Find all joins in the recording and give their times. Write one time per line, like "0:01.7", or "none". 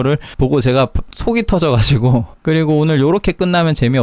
0:02.3